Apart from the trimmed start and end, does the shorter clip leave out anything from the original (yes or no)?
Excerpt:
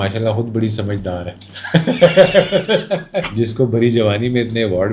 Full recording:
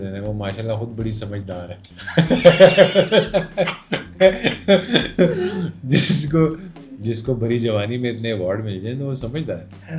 yes